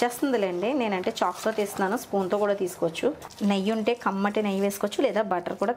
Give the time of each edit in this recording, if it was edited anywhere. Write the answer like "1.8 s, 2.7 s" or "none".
3.3 s